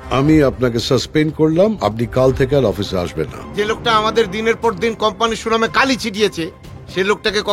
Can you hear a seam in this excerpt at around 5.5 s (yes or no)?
no